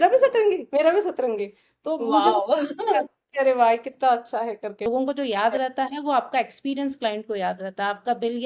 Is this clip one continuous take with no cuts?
no; 1 cut; at 4.8 s

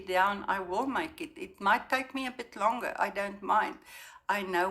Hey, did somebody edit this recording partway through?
no; 0 cuts

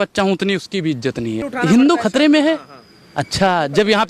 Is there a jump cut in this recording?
yes; 1 cut; at 1.5 s

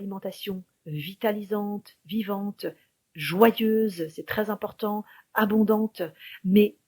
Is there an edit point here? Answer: no; 0 cuts

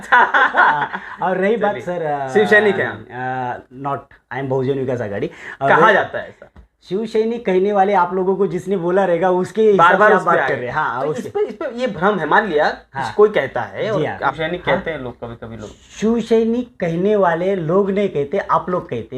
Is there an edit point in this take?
yes; 1 cut; at 14.4 s

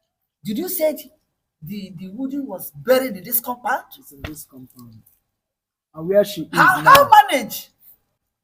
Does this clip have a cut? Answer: no; 0 cuts

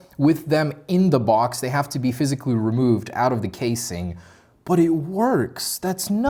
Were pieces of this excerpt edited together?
no; 0 cuts

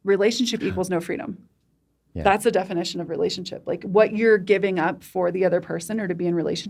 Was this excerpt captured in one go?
yes; 0 cuts

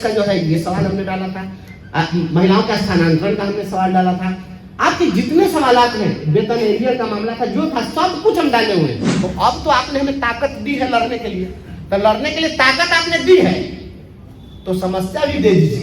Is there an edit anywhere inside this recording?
yes; 1 cut; at 9.1 s

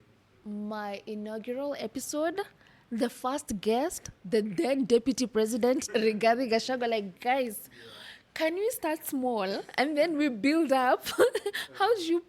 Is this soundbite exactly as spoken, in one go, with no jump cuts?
yes; 0 cuts

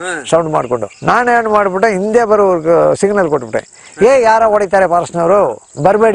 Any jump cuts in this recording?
no; 0 cuts

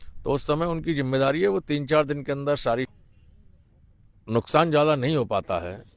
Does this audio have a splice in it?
yes; 1 cut; at 2.9 s

